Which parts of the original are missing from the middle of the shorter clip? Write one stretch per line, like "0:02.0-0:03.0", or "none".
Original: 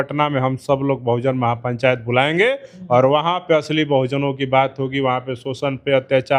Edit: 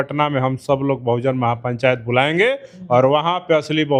none